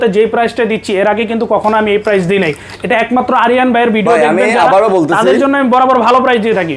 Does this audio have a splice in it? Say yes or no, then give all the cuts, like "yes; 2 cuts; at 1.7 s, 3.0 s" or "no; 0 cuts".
no; 0 cuts